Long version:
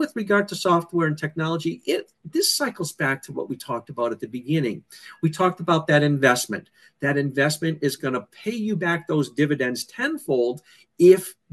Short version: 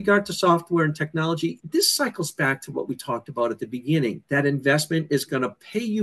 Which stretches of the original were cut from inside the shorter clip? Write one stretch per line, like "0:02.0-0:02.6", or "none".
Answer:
0:01.8-0:02.2
0:04.8-0:06.9